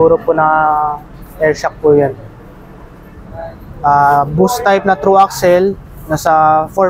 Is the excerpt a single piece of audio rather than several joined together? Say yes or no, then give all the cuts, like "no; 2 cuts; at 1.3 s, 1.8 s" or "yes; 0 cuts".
yes; 0 cuts